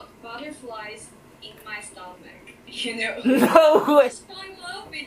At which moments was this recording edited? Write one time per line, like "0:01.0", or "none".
0:04.0